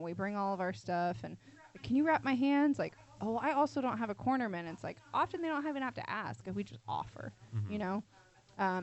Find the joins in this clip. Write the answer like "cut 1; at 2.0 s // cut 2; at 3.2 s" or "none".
none